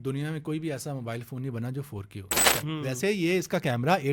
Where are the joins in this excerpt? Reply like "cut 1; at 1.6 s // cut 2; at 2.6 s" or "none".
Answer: cut 1; at 2.6 s